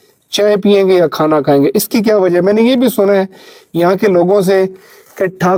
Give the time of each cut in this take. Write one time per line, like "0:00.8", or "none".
none